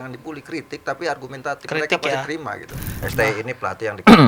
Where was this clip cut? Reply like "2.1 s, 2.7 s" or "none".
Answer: 3.0 s